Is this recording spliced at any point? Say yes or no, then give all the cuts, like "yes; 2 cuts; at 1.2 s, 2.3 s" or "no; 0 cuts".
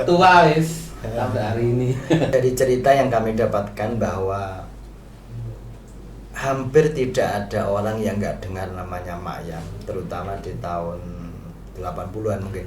yes; 1 cut; at 2.3 s